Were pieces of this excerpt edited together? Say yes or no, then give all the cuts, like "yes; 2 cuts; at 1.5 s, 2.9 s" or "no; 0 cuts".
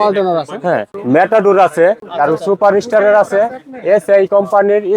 yes; 2 cuts; at 1.0 s, 2.1 s